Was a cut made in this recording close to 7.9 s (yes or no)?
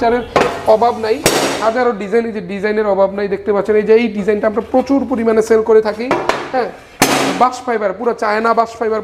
no